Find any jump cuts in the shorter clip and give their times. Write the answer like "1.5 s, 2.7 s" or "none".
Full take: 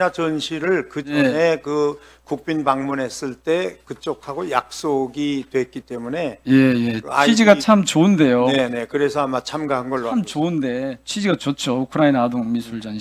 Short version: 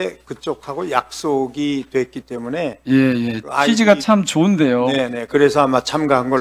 none